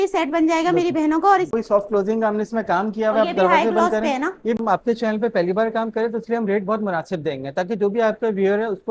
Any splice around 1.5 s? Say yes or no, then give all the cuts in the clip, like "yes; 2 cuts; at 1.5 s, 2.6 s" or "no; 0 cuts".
yes; 2 cuts; at 1.5 s, 4.6 s